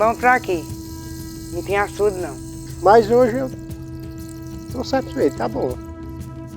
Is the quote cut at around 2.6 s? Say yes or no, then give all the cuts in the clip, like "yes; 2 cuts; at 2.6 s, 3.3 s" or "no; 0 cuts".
yes; 1 cut; at 2.6 s